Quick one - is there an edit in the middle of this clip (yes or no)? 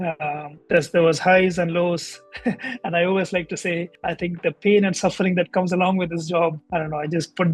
no